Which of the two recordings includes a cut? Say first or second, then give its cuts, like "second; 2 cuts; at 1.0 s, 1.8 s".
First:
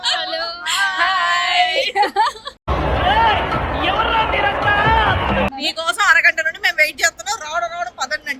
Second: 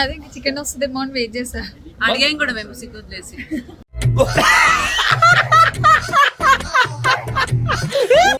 first; 1 cut; at 5.5 s